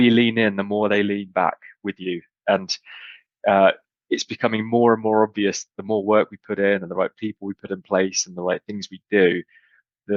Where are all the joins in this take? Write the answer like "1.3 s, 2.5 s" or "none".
none